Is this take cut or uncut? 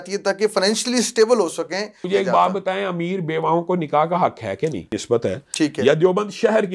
cut